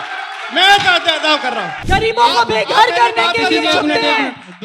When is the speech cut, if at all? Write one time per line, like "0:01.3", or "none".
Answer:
0:01.7